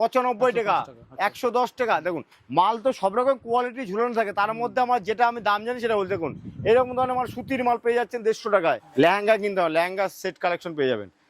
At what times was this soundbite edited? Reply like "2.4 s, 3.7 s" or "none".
8.8 s